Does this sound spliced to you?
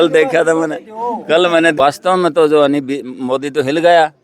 yes; 1 cut; at 1.8 s

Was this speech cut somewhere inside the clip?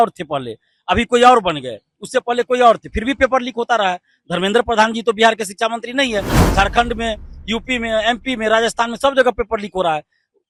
no; 0 cuts

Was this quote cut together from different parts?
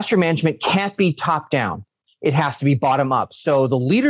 no; 0 cuts

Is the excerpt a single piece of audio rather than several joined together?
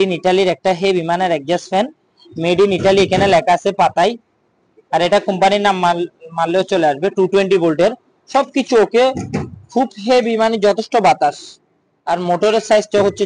yes; 0 cuts

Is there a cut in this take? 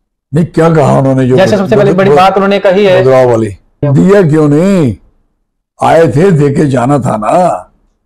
yes; 1 cut; at 3.9 s

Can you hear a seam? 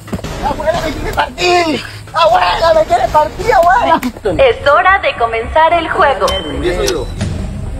yes; 1 cut; at 4.2 s

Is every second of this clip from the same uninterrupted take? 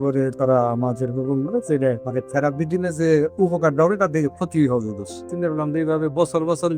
no; 2 cuts; at 2.0 s, 5.3 s

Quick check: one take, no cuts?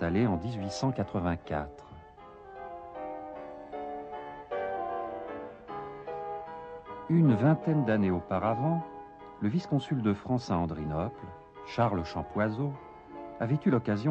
no; 1 cut; at 10.6 s

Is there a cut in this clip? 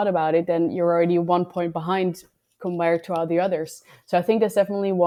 no; 0 cuts

